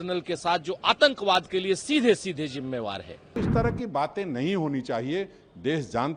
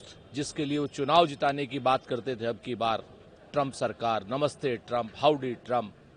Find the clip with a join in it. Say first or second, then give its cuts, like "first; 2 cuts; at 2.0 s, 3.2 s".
first; 1 cut; at 3.4 s